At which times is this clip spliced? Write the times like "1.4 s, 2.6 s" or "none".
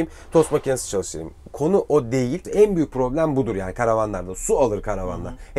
2.4 s